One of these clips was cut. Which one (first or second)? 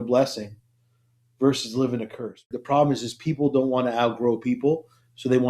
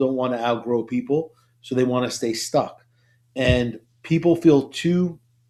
first